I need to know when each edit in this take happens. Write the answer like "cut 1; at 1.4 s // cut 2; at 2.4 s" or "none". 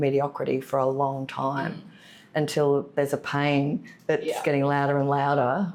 none